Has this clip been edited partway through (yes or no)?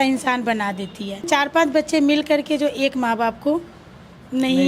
yes